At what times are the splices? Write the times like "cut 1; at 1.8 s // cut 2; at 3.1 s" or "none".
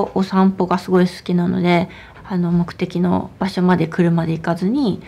cut 1; at 2.1 s

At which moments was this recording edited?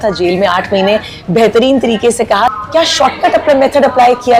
cut 1; at 2.5 s

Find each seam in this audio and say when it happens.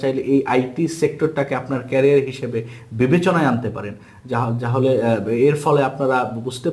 none

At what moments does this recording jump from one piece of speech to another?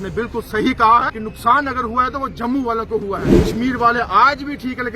cut 1; at 1.2 s // cut 2; at 3.4 s

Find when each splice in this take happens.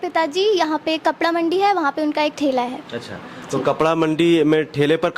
none

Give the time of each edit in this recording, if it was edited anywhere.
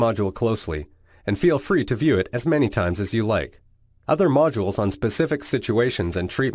none

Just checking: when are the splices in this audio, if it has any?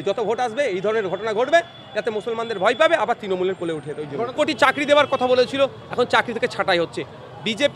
cut 1; at 4.3 s

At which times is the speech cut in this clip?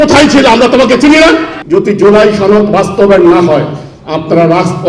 cut 1; at 1.6 s

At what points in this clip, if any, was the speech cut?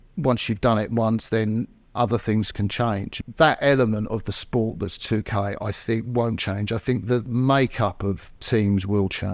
cut 1; at 3.1 s // cut 2; at 7.3 s // cut 3; at 8.3 s

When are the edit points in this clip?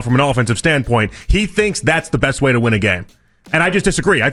none

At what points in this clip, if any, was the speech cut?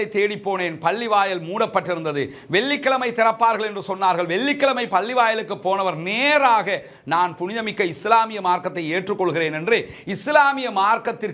none

